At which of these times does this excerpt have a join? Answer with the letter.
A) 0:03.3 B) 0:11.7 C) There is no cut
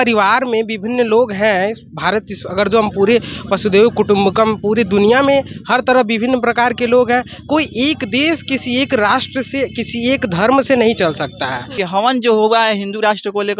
B